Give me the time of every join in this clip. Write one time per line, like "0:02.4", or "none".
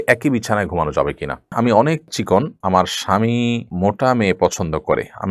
0:01.5